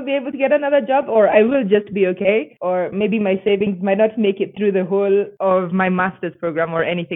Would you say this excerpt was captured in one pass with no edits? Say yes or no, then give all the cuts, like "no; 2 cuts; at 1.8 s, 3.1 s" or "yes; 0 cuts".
yes; 0 cuts